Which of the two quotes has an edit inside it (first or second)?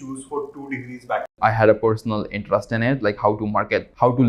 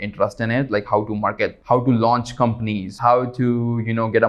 first